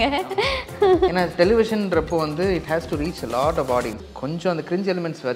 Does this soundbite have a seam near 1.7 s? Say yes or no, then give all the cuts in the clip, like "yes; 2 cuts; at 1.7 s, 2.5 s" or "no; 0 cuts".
no; 1 cut; at 4.0 s